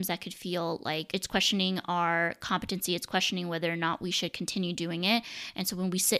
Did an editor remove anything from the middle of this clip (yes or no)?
yes